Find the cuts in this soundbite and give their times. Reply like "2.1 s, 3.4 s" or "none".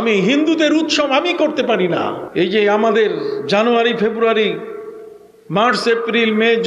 2.2 s